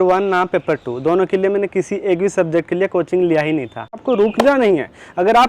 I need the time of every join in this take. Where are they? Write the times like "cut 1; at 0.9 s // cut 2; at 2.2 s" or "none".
cut 1; at 3.9 s